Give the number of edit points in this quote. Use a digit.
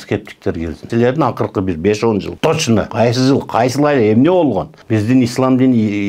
3